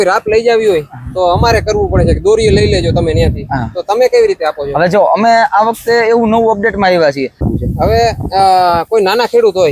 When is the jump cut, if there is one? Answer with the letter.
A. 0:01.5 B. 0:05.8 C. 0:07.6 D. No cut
C